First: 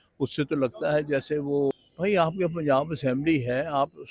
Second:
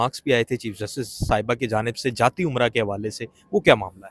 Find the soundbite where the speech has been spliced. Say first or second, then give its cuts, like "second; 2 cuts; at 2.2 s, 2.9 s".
first; 1 cut; at 1.8 s